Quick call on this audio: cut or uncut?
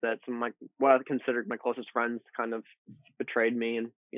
uncut